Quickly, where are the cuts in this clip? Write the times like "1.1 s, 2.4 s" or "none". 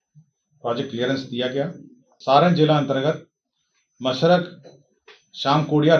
2.1 s